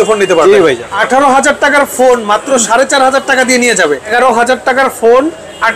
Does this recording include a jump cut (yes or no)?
yes